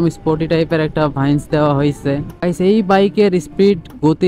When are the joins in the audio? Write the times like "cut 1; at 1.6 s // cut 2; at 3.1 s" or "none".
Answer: cut 1; at 2.3 s

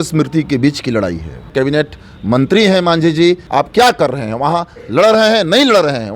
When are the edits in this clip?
cut 1; at 1.5 s // cut 2; at 3.4 s

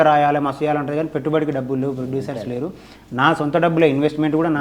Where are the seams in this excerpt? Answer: none

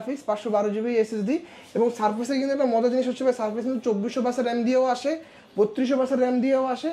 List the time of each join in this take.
none

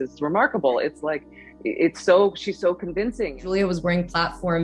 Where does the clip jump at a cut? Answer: cut 1; at 3.4 s

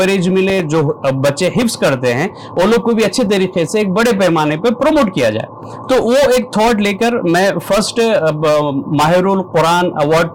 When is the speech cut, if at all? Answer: none

